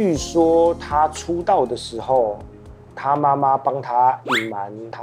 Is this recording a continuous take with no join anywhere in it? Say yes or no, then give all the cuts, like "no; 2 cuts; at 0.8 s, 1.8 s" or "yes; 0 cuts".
yes; 0 cuts